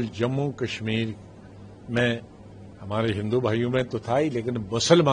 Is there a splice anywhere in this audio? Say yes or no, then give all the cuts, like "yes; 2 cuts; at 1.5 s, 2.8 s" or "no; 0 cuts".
no; 0 cuts